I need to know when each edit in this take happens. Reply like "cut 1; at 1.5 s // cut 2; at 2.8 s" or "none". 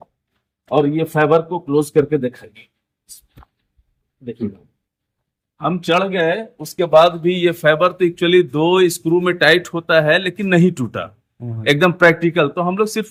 none